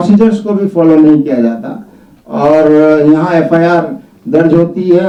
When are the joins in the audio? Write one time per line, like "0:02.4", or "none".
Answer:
none